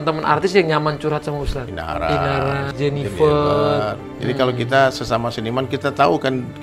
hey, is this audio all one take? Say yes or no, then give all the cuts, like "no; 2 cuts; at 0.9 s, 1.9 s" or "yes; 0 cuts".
no; 3 cuts; at 1.7 s, 2.7 s, 4.1 s